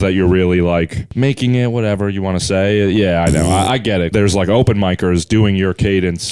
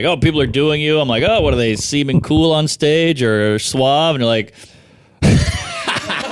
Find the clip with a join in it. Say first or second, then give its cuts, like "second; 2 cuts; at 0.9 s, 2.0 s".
first; 2 cuts; at 1.0 s, 4.1 s